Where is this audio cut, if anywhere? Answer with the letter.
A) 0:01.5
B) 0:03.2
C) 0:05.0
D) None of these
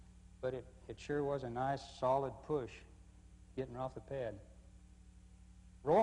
A